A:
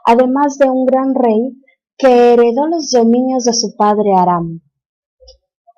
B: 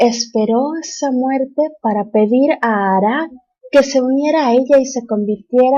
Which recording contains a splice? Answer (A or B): A